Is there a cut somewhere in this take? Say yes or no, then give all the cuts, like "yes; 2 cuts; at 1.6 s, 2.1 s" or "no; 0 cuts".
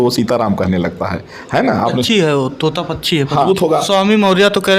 yes; 1 cut; at 3.5 s